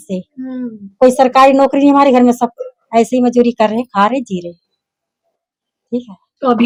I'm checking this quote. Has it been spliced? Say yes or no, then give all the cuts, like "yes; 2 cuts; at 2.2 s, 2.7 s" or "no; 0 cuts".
no; 0 cuts